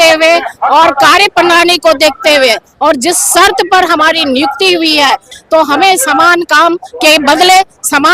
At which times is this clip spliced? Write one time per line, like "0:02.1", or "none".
0:05.3